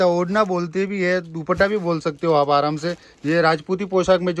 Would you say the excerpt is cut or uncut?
uncut